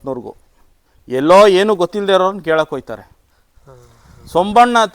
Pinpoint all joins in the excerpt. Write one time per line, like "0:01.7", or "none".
none